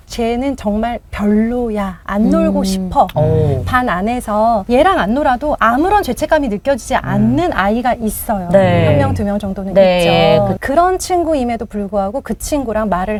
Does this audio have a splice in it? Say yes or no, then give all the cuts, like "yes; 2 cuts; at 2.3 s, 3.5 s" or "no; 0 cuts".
no; 0 cuts